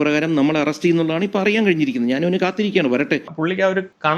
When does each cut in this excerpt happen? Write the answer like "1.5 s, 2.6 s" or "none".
3.3 s